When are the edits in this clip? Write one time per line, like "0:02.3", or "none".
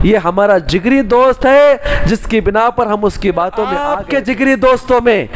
0:03.9